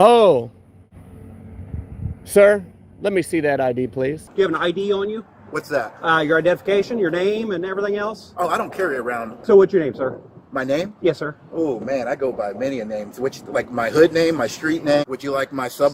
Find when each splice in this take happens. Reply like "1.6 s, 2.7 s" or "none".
0.9 s, 4.2 s, 9.3 s, 15.0 s